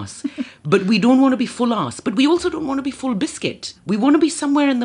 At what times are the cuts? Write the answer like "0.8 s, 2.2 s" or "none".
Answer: 3.8 s